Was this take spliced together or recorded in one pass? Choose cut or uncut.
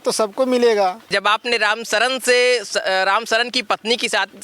cut